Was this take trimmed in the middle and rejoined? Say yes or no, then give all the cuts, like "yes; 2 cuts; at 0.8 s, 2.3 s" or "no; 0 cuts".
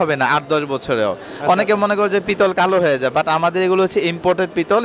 no; 0 cuts